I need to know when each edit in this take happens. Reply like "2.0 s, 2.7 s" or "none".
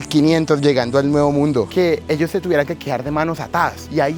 1.7 s